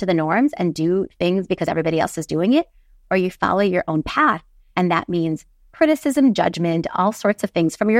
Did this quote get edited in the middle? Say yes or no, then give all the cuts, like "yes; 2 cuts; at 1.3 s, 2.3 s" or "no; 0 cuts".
no; 0 cuts